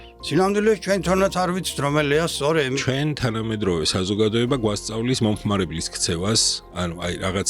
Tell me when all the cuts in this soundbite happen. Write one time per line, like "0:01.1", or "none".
0:02.8